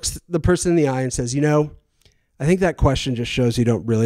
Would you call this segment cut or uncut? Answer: uncut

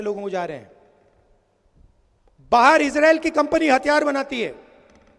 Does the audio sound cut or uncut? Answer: uncut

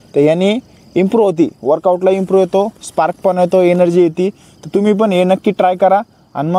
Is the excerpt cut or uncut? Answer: uncut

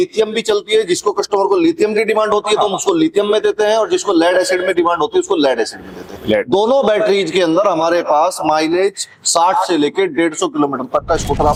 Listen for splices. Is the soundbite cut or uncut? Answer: uncut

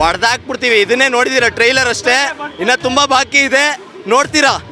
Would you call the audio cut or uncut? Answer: uncut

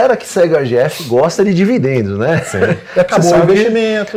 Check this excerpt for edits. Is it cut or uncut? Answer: uncut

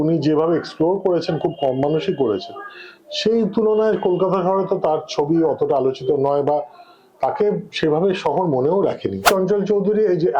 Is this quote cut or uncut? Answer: cut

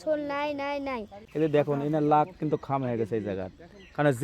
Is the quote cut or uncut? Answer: cut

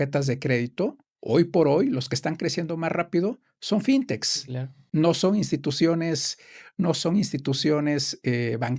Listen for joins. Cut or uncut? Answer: uncut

